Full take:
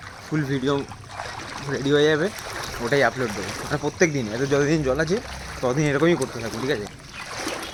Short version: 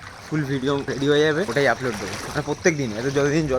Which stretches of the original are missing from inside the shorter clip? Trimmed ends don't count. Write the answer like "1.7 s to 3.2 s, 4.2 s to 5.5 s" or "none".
0.8 s to 1.7 s, 2.3 s to 2.8 s